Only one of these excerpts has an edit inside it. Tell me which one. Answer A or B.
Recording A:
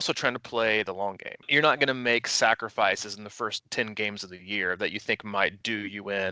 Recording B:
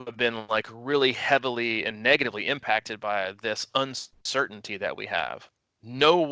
A